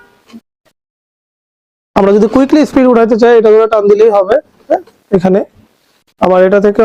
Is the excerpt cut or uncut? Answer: uncut